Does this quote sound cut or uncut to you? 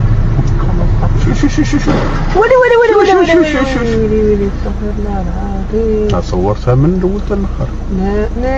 uncut